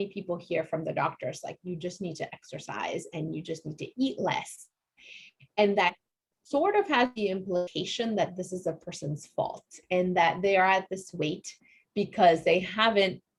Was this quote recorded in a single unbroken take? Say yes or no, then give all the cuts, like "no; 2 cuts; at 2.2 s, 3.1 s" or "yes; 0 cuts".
yes; 0 cuts